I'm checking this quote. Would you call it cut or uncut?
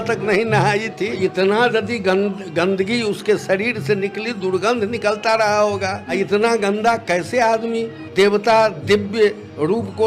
cut